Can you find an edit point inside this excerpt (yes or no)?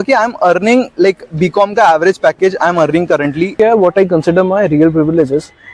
yes